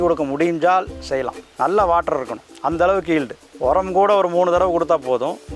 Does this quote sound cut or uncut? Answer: uncut